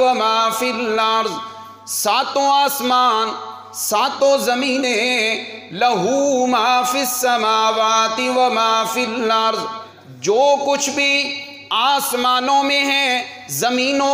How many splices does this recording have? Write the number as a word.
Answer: one